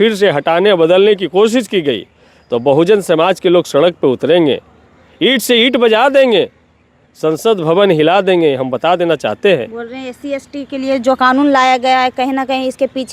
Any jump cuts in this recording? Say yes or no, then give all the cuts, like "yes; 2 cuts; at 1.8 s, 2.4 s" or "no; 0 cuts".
no; 0 cuts